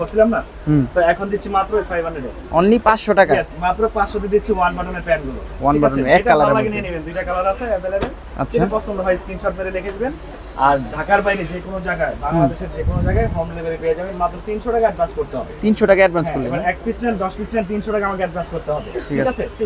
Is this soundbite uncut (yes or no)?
yes